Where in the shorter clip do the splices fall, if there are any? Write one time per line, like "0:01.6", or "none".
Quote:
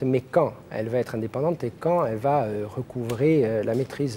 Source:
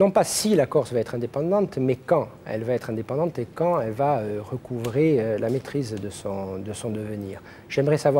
none